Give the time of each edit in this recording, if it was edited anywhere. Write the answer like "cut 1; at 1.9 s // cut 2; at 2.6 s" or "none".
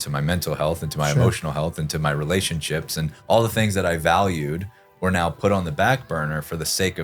cut 1; at 3.2 s

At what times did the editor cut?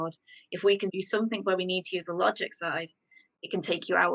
cut 1; at 1.0 s

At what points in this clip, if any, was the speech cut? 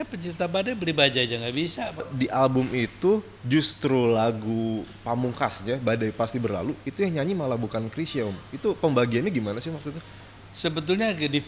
cut 1; at 2.1 s

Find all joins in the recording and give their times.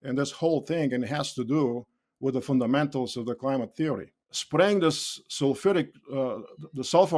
cut 1; at 4.3 s

